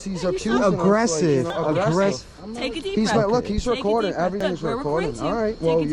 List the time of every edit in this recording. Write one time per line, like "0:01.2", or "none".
0:04.4